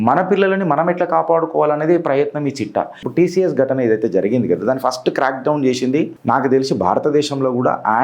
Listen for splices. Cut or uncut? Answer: cut